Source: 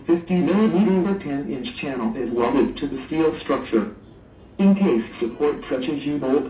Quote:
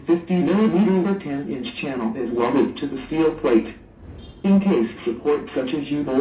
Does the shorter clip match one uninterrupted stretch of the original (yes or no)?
no